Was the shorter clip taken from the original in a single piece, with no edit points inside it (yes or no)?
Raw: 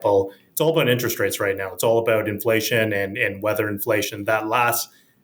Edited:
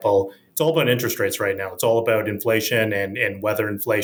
yes